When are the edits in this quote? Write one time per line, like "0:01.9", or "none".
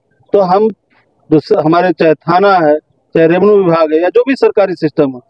none